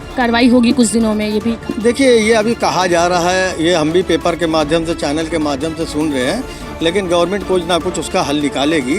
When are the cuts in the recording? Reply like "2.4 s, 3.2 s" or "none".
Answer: 1.7 s